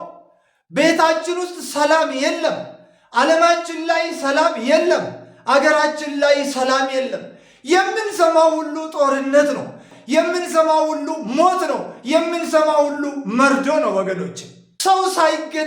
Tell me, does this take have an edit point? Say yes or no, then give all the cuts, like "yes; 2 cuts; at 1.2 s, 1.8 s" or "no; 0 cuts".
yes; 2 cuts; at 9.9 s, 14.7 s